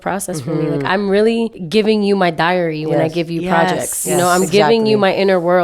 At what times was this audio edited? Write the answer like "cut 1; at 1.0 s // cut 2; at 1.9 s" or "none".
cut 1; at 1.6 s